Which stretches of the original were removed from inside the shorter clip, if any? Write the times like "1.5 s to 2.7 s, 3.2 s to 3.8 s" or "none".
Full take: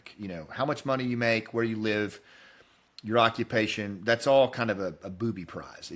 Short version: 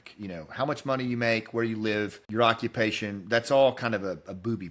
2.2 s to 3.0 s